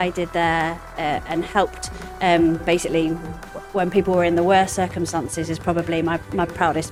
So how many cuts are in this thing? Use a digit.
0